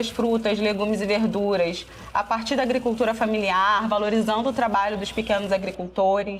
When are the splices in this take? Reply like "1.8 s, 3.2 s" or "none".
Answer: none